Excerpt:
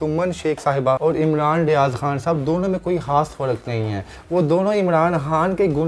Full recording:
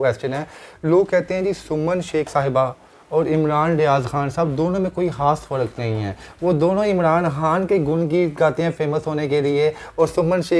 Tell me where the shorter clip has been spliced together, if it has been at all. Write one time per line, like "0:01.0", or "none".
0:01.0